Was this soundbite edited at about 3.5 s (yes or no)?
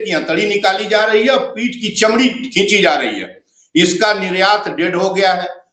no